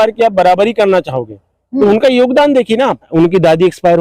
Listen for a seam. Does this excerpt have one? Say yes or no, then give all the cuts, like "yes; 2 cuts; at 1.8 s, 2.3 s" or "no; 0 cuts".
yes; 1 cut; at 3.1 s